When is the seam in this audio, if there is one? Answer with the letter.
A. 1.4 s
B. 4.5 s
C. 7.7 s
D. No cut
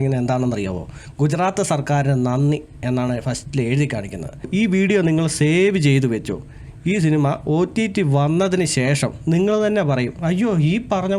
B